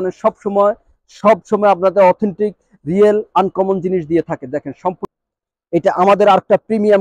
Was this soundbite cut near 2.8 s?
no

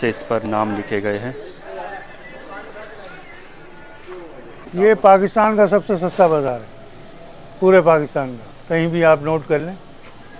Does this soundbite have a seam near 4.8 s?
yes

